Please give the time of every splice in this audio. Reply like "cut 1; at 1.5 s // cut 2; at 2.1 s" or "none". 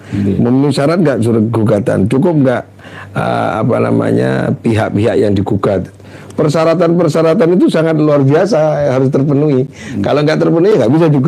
none